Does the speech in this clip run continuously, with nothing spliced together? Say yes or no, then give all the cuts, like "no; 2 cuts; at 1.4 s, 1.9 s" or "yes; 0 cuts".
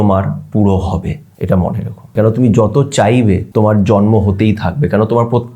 no; 3 cuts; at 1.3 s, 2.1 s, 3.5 s